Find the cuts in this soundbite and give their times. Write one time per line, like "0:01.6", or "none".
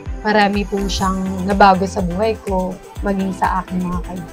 none

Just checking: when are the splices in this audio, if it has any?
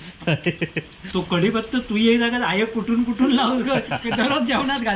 0:01.0

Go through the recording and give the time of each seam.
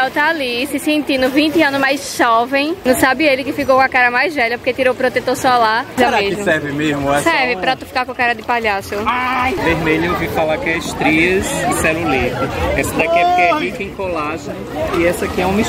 0:02.8
0:06.0
0:09.6

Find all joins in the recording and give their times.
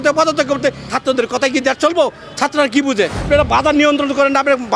0:00.9
0:03.2

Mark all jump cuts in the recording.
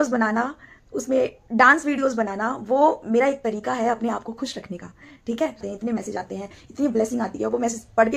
0:05.7

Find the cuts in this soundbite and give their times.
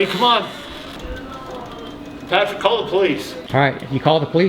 0:01.0
0:03.3

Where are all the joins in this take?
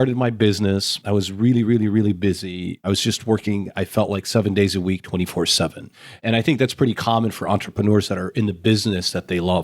0:00.9
0:02.8

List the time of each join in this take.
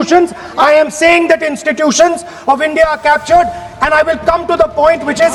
none

